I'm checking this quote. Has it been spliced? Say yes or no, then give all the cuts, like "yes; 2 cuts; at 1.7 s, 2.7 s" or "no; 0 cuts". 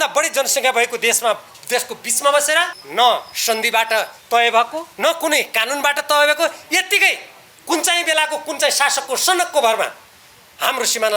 yes; 3 cuts; at 2.8 s, 4.2 s, 4.8 s